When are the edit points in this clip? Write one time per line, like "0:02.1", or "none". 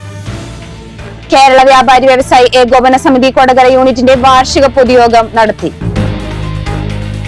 0:01.1